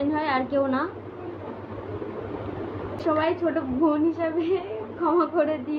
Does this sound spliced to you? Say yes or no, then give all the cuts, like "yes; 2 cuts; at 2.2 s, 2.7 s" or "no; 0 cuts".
no; 0 cuts